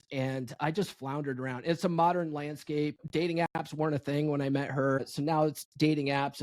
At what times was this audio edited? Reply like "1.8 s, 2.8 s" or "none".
3.0 s, 5.1 s

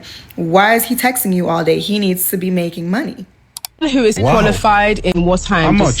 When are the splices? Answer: 3.7 s

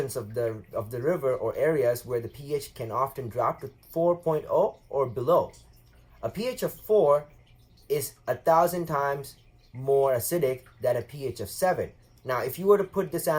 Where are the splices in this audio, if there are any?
none

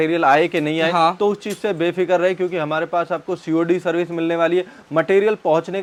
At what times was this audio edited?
none

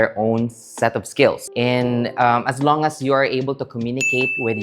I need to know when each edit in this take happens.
1.4 s

